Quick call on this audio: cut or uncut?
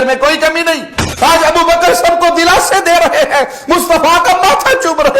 cut